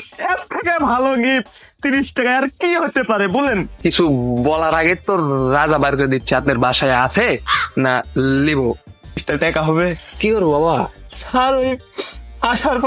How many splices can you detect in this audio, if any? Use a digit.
2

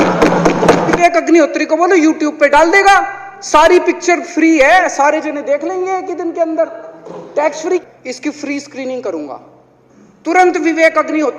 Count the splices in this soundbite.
2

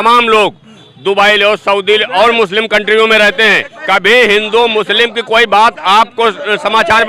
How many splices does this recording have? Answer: 1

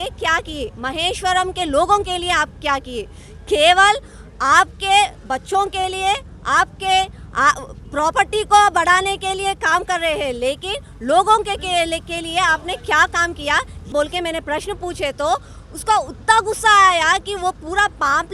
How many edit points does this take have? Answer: 1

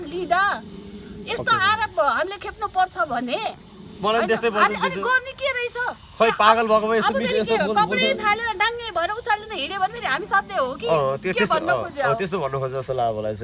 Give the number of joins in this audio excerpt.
0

